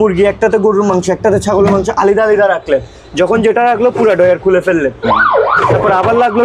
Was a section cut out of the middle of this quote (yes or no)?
no